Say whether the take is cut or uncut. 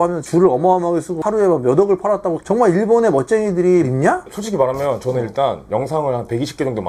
uncut